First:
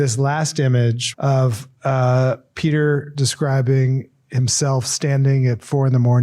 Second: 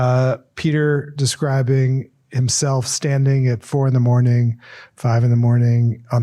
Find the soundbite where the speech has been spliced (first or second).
first